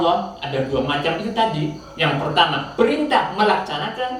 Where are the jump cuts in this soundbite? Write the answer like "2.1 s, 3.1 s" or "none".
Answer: none